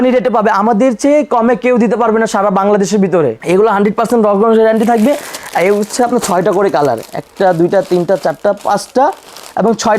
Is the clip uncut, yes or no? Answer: no